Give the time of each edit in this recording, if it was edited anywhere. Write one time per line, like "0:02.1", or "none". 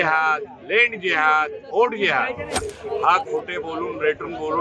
0:02.7